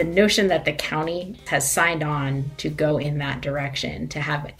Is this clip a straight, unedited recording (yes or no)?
no